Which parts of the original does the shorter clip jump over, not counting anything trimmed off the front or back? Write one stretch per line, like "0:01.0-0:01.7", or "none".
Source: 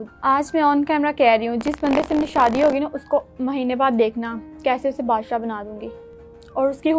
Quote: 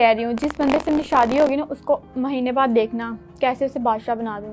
none